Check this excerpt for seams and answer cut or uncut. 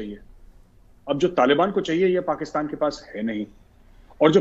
uncut